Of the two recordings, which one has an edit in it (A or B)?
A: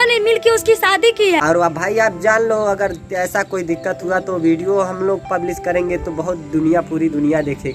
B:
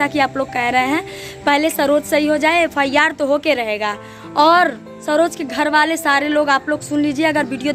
A